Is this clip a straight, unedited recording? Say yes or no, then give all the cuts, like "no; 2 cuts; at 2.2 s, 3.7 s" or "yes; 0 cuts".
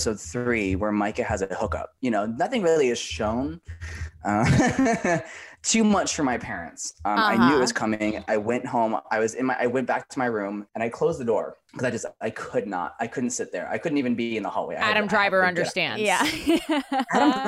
yes; 0 cuts